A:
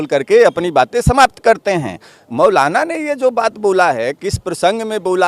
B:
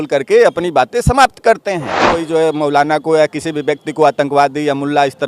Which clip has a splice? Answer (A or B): B